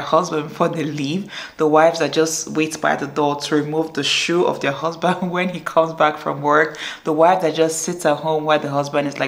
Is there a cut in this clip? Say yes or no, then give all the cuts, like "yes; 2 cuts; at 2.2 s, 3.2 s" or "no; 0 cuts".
no; 0 cuts